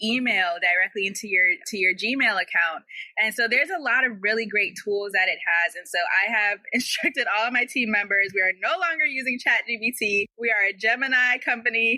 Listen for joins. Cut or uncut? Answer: cut